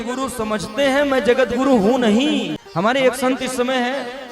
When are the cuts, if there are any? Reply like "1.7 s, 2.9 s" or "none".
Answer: 2.6 s